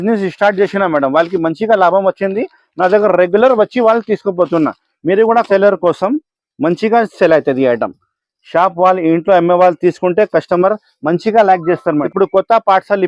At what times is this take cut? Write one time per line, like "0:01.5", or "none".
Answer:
0:05.5
0:12.1